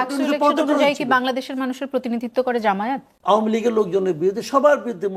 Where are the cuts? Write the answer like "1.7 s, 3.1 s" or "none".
3.1 s